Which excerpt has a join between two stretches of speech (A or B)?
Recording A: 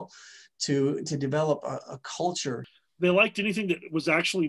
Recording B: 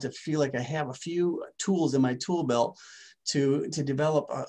A